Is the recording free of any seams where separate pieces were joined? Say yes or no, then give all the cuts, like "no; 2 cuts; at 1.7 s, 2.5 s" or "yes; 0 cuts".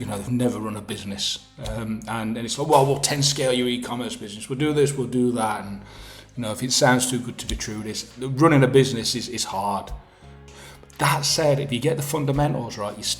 no; 1 cut; at 10.4 s